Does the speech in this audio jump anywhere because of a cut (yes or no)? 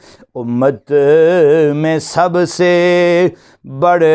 no